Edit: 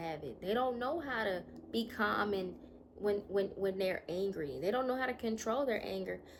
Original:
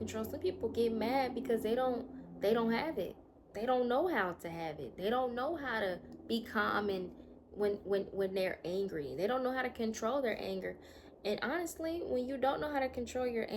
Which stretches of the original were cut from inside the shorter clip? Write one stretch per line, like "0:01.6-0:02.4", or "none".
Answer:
none

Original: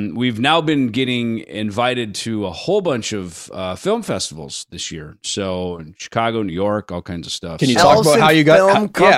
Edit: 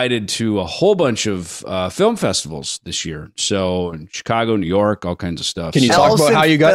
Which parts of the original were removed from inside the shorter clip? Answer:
none

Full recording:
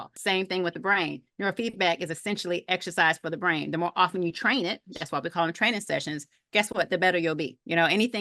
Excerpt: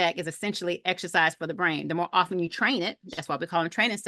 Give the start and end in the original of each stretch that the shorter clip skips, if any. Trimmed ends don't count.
none

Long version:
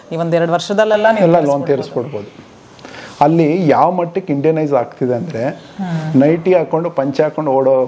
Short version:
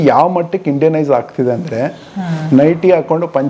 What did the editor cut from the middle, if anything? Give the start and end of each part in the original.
none

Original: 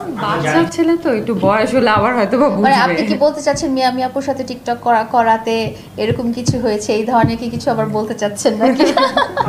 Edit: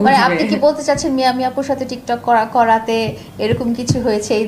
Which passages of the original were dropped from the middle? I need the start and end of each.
none

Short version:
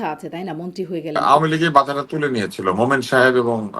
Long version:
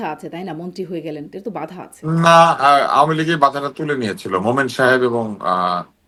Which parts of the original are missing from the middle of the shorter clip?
0:01.2-0:02.9

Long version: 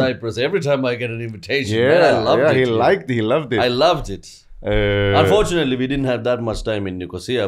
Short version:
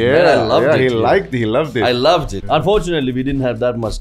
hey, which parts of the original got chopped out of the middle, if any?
0:04.2-0:05.1

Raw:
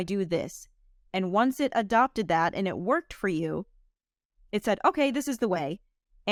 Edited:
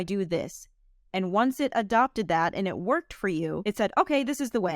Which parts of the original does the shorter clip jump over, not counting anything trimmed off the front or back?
0:03.6-0:04.5

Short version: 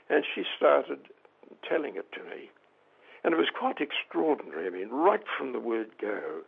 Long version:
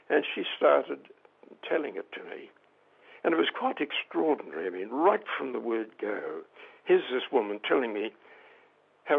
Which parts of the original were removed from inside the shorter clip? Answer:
none

